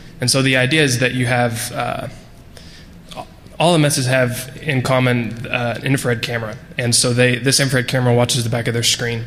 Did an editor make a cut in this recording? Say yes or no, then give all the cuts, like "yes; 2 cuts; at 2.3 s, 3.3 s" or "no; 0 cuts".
no; 0 cuts